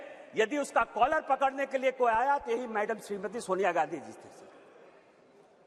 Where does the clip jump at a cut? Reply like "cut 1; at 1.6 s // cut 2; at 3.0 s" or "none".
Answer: none